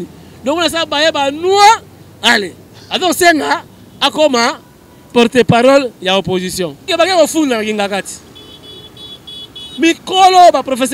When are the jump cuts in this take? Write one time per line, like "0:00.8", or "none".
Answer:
0:06.9